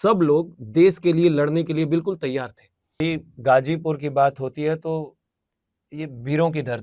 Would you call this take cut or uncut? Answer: cut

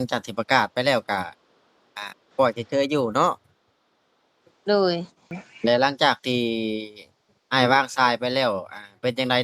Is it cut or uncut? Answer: cut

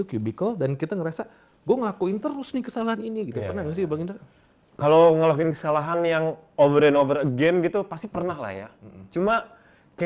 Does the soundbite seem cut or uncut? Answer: uncut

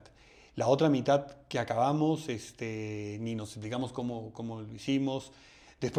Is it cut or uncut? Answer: uncut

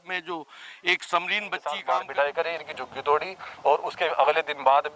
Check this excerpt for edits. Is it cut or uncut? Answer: cut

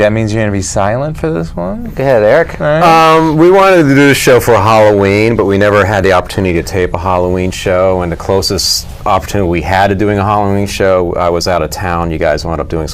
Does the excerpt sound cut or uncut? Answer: cut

